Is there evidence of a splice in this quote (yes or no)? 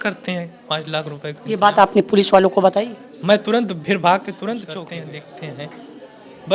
yes